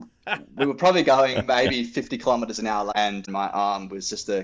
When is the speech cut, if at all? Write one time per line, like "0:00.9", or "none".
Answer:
0:03.0